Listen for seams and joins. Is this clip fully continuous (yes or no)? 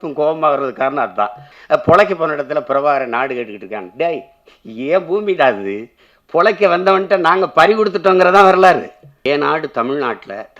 no